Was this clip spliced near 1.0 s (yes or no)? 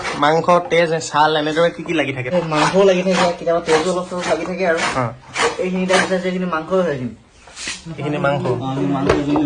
no